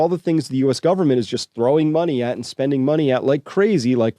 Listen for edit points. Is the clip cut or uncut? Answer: uncut